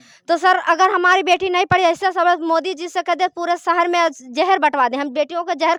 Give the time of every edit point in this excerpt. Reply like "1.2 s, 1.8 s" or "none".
none